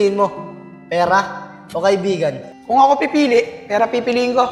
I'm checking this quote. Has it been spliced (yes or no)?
yes